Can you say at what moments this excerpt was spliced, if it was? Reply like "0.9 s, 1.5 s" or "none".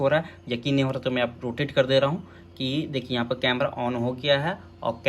none